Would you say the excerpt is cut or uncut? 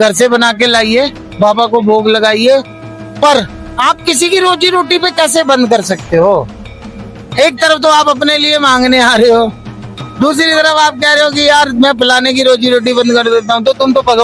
uncut